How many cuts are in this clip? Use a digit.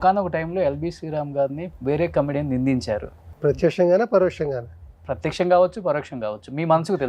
2